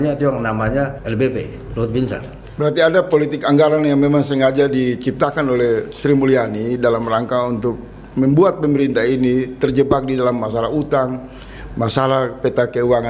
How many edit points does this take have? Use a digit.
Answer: 2